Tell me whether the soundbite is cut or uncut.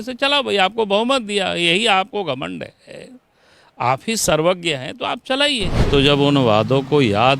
cut